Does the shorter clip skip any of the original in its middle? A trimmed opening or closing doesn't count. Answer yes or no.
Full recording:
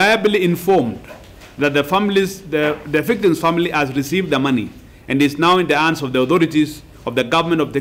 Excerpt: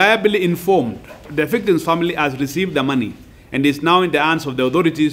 yes